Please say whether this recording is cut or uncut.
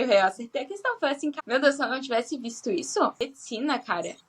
cut